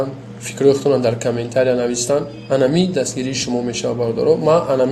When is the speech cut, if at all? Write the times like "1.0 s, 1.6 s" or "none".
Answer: none